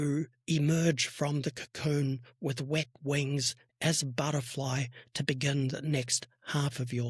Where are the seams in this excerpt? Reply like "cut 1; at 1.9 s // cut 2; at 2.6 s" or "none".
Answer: none